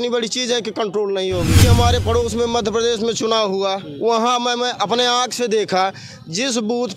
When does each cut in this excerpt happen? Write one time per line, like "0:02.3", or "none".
0:01.6